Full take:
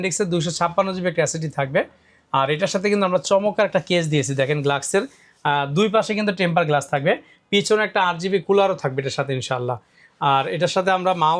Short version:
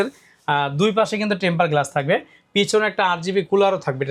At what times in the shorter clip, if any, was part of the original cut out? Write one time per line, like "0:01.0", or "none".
none